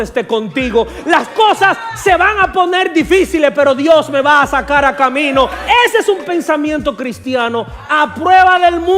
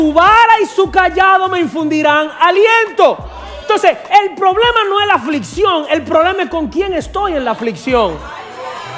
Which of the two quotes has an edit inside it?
first; 1 cut; at 5.6 s

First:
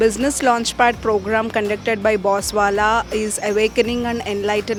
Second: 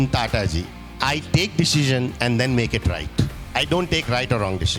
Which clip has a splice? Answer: second; 1 cut; at 3.4 s

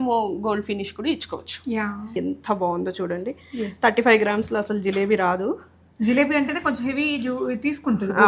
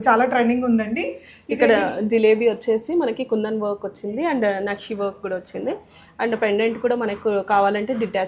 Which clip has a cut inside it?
first; 1 cut; at 2.1 s

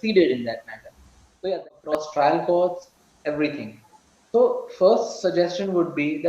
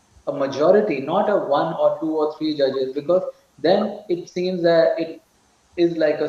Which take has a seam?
first; 1 cut; at 1.5 s

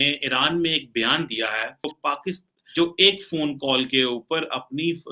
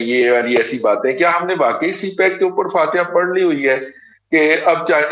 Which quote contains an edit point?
first; 1 cut; at 2.3 s

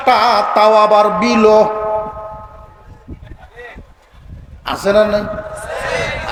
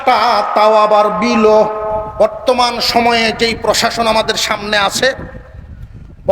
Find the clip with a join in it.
second; 1 cut; at 2.1 s

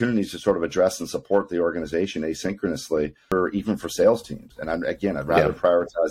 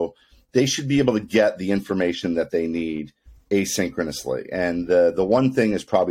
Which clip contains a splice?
first; 1 cut; at 3.3 s

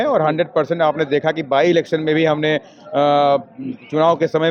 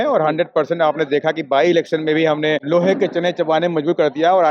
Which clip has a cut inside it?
second; 1 cut; at 2.6 s

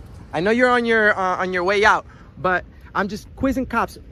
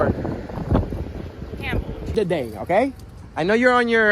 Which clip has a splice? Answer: second; 1 cut; at 2.1 s

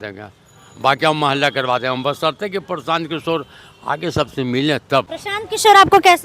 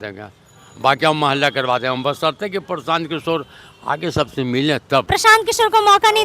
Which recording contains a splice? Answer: second; 1 cut; at 5.1 s

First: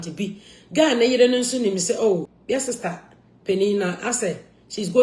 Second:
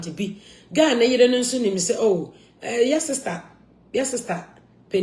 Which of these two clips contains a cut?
first; 1 cut; at 2.3 s

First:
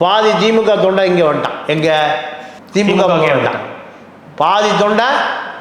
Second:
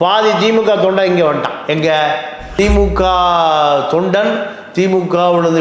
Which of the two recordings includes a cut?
second; 1 cut; at 2.4 s

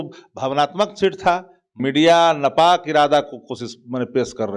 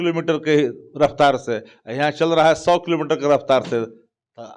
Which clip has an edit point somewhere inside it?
first; 1 cut; at 1.8 s

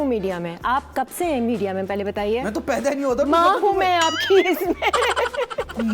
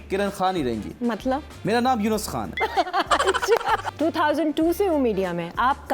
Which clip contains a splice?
second; 3 cuts; at 0.9 s, 2.4 s, 3.8 s

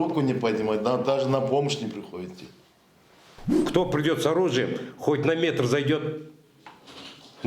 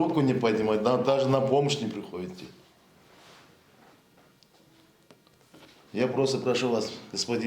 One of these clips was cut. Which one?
first; 1 cut; at 3.6 s

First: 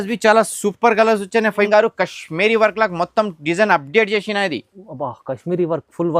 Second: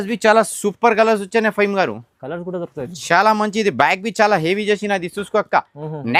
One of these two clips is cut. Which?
first; 1 cut; at 1.7 s

